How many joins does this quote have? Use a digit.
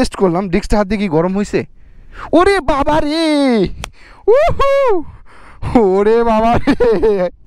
0